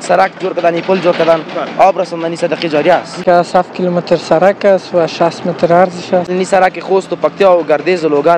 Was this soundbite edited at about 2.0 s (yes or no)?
no